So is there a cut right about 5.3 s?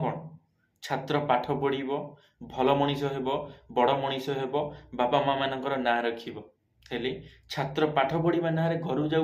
no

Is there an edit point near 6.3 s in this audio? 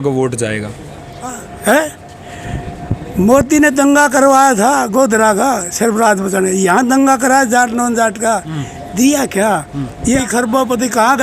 no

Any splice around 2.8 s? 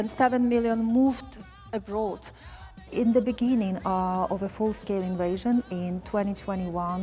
yes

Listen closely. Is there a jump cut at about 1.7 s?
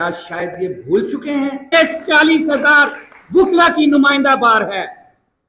yes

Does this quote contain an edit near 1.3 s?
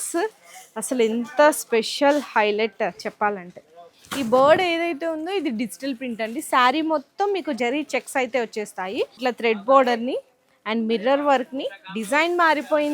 no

